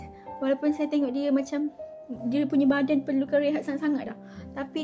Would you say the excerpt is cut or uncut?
uncut